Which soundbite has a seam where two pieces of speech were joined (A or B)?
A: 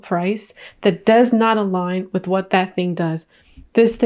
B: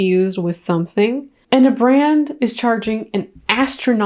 B